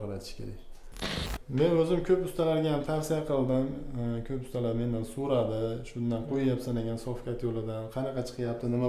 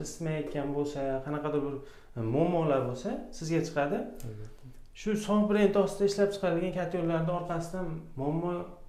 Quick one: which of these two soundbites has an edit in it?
first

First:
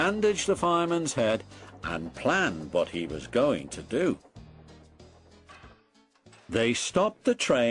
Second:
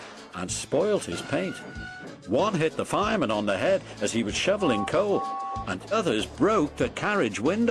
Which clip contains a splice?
first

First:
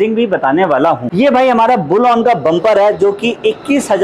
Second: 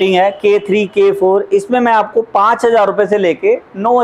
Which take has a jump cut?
first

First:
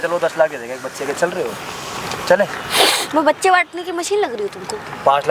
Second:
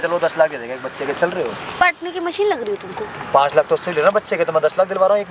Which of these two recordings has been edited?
second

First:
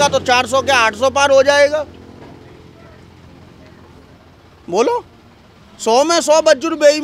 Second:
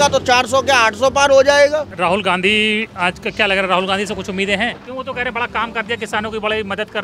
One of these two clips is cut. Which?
second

